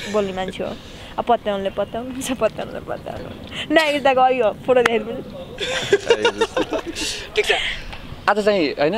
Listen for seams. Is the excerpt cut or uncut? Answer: uncut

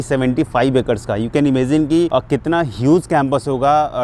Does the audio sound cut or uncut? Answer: cut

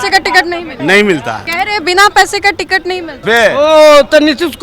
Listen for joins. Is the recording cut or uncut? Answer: cut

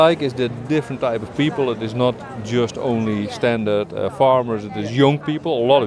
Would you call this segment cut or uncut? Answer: uncut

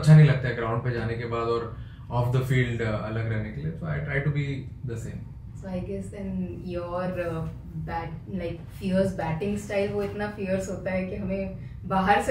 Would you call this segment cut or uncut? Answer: uncut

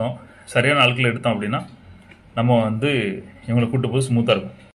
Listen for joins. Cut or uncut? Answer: uncut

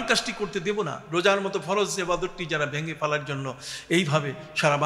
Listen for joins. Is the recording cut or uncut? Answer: uncut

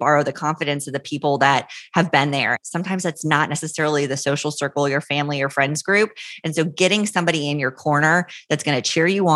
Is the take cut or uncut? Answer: cut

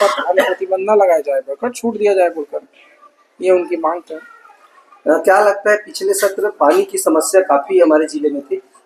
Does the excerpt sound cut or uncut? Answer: uncut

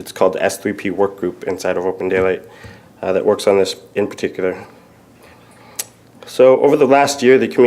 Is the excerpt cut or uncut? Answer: cut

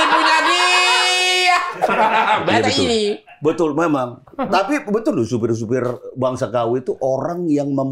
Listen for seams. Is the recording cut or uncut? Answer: cut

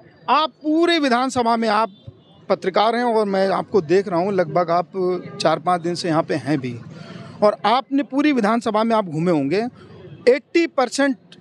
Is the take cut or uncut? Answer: uncut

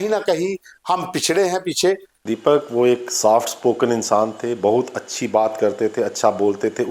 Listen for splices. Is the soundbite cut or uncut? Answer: cut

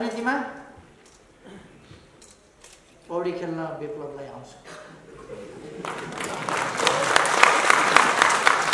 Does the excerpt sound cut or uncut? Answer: uncut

